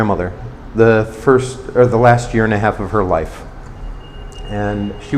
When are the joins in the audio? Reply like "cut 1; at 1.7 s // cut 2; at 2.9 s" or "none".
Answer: none